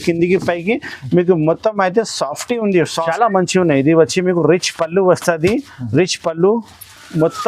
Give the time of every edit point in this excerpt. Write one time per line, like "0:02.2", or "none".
0:03.0